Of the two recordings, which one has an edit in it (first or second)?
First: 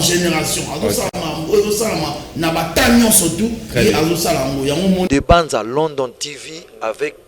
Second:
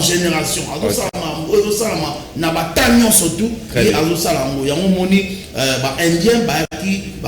first